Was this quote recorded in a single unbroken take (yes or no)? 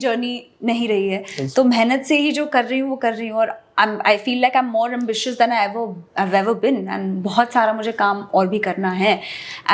yes